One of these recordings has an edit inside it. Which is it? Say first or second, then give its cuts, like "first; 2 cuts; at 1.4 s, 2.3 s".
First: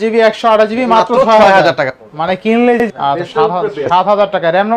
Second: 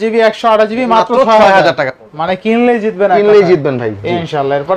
first; 1 cut; at 2.9 s